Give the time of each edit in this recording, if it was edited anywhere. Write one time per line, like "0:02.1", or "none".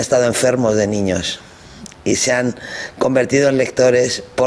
0:03.1